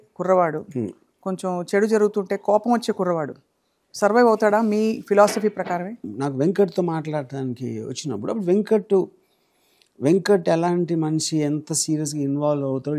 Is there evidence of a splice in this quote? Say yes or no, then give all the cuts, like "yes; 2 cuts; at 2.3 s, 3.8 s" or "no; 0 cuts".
yes; 1 cut; at 6.1 s